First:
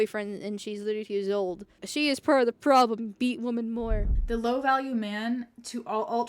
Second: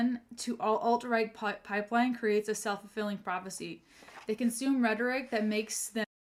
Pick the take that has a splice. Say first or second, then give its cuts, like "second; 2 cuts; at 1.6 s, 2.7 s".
first; 2 cuts; at 1.8 s, 4.1 s